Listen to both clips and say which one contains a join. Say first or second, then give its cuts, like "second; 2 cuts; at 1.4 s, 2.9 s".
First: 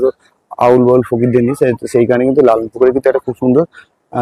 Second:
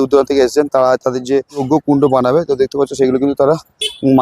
second; 1 cut; at 1.6 s